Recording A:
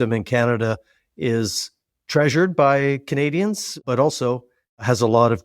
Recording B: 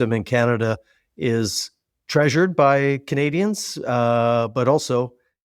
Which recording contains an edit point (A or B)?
A